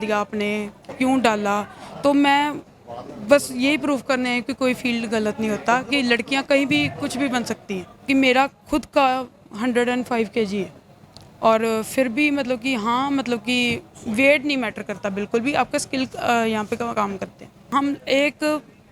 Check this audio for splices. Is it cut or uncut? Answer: cut